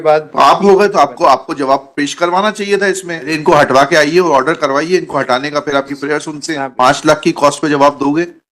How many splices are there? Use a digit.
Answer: 2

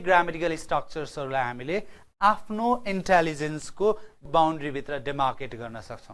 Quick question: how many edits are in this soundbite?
1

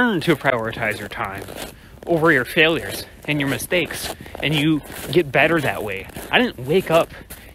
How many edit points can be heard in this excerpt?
0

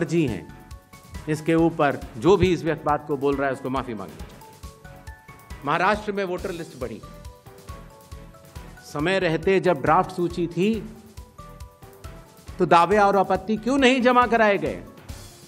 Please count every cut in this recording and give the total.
4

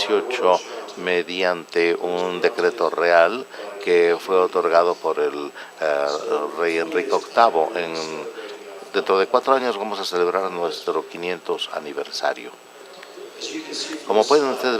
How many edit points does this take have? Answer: 1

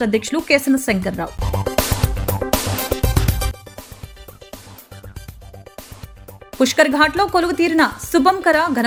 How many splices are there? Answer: 0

